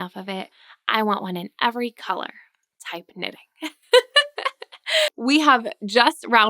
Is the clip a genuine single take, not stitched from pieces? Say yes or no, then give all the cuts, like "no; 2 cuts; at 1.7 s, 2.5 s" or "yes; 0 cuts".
no; 1 cut; at 5.1 s